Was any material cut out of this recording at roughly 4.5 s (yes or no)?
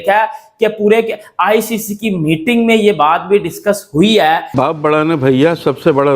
yes